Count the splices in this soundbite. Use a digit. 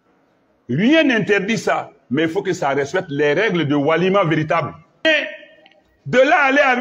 1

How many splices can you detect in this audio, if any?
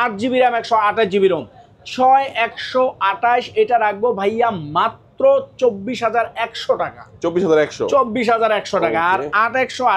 0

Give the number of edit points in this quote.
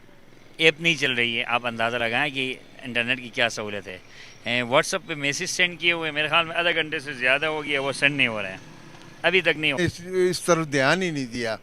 1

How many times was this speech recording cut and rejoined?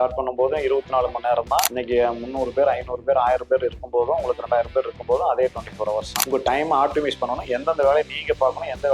2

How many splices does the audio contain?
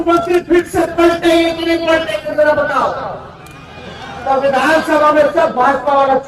0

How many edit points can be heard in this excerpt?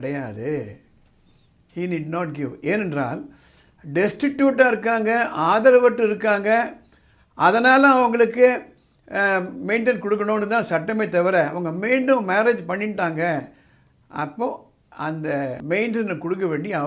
1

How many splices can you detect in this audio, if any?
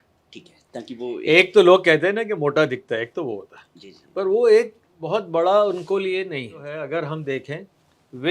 1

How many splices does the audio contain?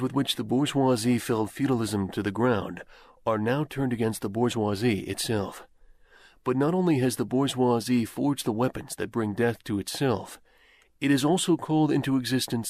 0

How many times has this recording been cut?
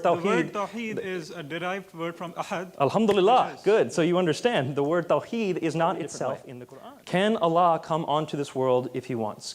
1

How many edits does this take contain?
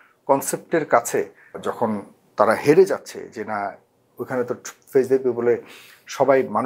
1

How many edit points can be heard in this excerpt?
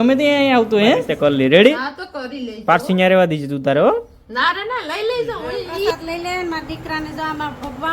2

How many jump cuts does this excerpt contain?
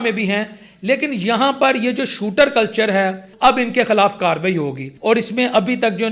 2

